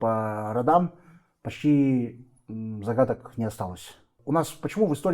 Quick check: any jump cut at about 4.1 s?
yes; 1 cut; at 4.1 s

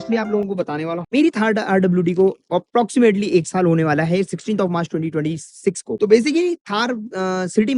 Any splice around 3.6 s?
no; 2 cuts; at 1.0 s, 5.9 s

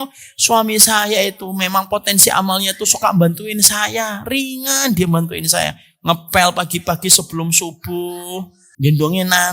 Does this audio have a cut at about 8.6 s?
yes; 1 cut; at 8.6 s

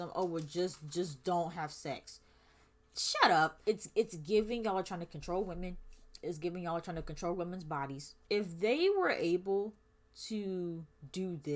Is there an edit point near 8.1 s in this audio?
yes; 2 cuts; at 3.6 s, 8.1 s

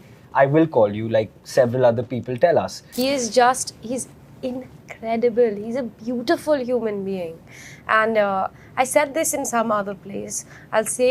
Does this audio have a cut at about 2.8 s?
yes; 1 cut; at 2.8 s

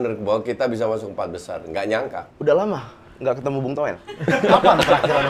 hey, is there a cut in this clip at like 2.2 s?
yes; 1 cut; at 2.2 s

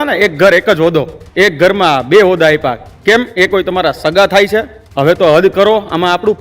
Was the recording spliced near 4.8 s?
yes; 3 cuts; at 1.2 s, 2.9 s, 4.8 s

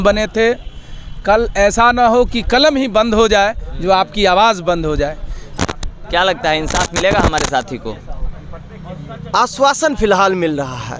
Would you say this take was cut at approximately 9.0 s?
no; 1 cut; at 5.5 s

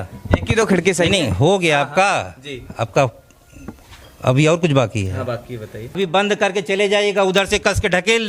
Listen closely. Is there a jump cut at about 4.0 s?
no; 1 cut; at 5.9 s

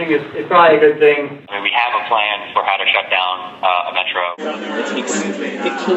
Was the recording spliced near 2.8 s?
no; 2 cuts; at 1.5 s, 4.4 s

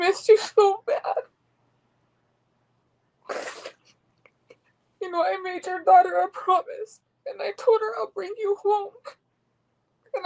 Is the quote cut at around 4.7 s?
no; 1 cut; at 2.8 s

